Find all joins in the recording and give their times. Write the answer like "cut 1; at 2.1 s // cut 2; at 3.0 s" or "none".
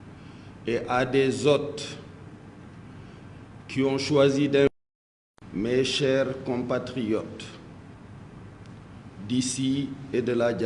cut 1; at 4.7 s